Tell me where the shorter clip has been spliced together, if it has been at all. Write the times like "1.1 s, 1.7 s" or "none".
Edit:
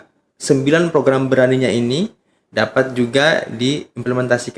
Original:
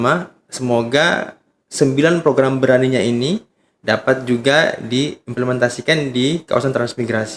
none